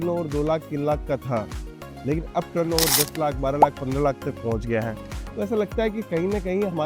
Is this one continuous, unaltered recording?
yes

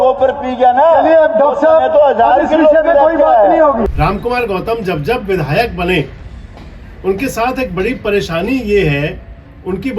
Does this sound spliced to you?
yes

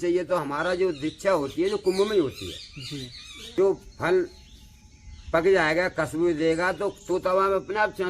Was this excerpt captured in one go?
no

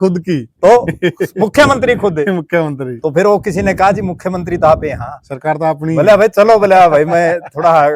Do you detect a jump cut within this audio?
no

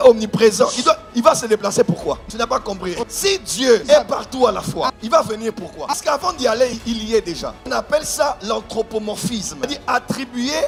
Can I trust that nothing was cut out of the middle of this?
yes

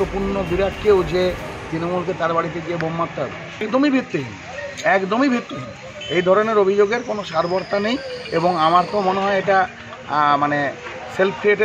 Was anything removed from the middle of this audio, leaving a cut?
yes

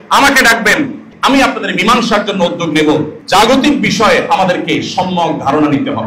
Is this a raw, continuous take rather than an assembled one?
no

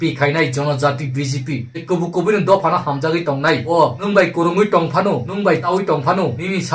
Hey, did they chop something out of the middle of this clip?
yes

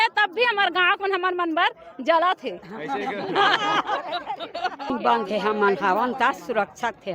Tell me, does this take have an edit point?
yes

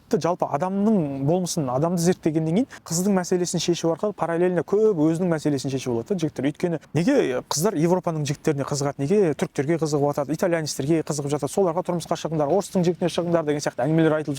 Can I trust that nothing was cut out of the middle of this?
no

